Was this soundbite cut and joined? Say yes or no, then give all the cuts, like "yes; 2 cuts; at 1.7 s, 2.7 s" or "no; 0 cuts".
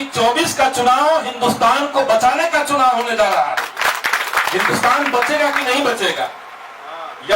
no; 0 cuts